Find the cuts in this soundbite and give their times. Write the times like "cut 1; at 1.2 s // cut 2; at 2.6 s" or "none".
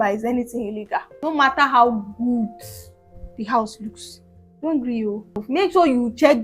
cut 1; at 1.1 s // cut 2; at 5.4 s